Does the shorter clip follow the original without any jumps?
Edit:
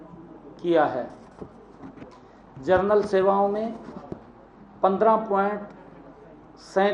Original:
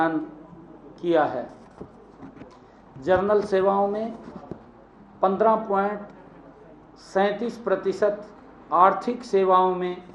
yes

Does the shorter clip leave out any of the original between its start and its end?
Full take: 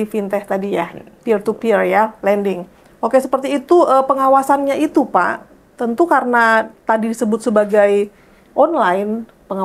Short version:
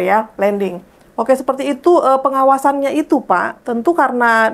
yes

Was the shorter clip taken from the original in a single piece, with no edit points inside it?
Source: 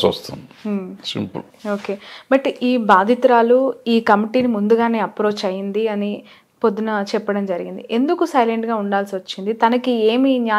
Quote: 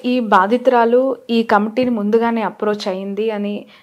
yes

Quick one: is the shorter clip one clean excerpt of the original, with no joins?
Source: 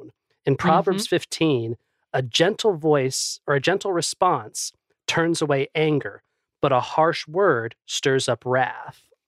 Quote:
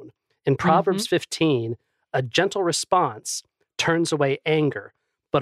no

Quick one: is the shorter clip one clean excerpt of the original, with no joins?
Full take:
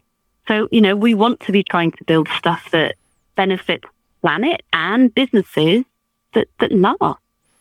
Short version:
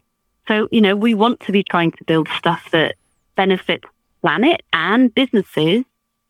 yes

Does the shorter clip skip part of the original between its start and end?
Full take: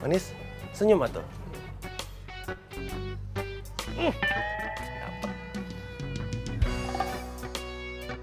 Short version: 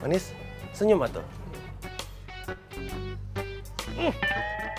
no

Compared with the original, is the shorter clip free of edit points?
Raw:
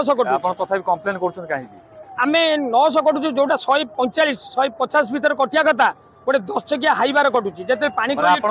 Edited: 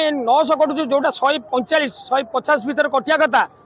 yes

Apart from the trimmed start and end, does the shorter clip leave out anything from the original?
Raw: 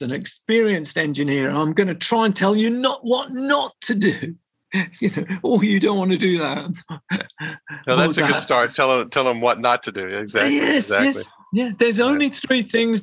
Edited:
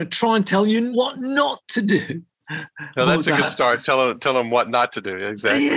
yes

